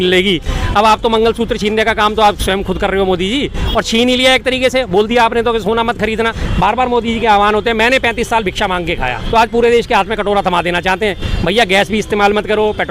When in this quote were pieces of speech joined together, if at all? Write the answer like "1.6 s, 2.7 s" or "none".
6.4 s, 9.2 s, 11.3 s